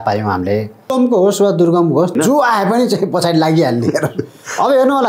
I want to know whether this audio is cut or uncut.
cut